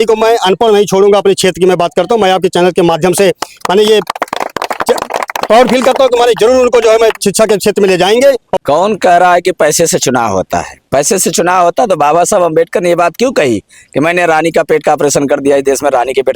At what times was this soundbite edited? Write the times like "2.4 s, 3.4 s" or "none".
8.5 s